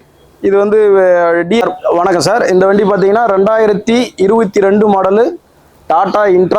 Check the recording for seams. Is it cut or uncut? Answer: cut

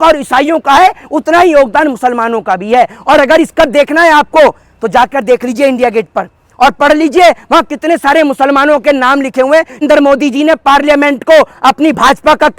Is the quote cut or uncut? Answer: cut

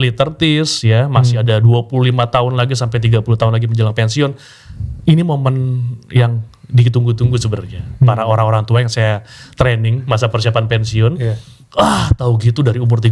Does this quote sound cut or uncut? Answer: uncut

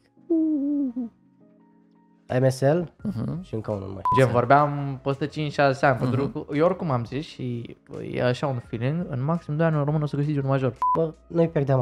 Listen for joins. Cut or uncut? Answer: cut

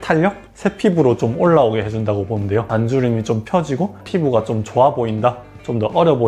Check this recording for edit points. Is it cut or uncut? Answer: cut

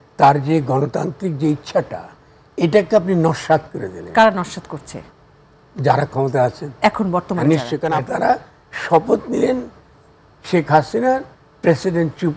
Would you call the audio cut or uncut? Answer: cut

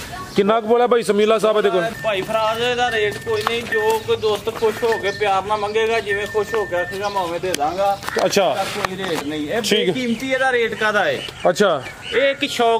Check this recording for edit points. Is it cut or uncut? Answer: cut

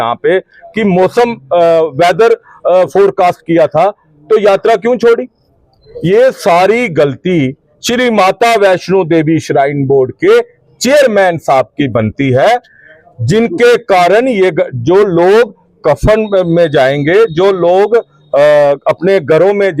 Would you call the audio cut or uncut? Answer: uncut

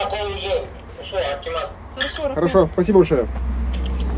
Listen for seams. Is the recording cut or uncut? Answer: uncut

